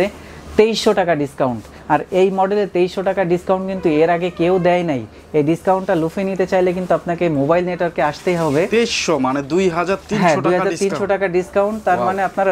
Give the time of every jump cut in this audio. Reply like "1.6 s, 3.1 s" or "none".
none